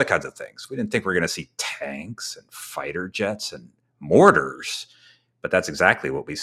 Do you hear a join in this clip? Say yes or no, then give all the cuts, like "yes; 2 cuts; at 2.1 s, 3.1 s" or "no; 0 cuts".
no; 0 cuts